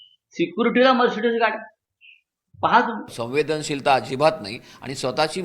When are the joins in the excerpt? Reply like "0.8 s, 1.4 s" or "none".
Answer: 3.1 s